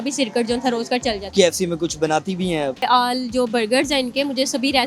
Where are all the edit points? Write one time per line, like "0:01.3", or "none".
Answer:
0:01.2
0:02.8

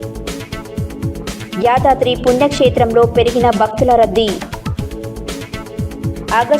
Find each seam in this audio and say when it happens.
none

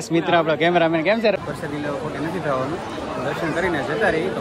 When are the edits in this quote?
0:01.3

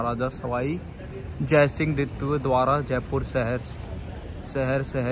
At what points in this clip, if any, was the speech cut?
none

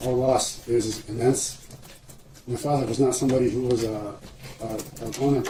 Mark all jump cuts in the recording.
none

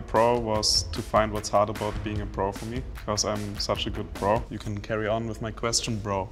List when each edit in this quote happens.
0:02.9
0:04.5

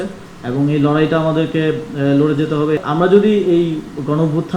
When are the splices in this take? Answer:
0:02.9

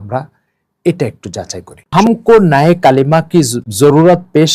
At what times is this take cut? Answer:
0:01.9
0:03.6

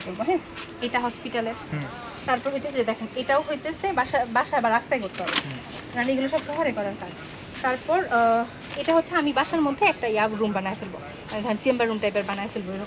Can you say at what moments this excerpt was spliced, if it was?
none

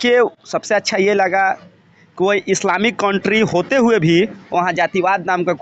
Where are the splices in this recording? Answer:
none

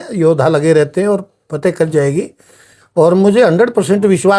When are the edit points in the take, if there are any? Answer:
none

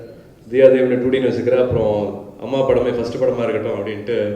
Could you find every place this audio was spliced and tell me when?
none

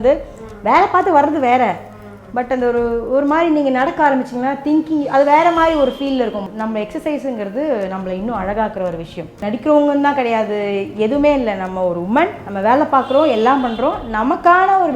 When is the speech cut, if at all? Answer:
0:06.4
0:09.4
0:12.5

